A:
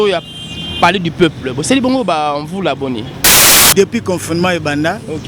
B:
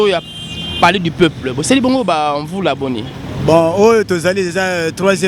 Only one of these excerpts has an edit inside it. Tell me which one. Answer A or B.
A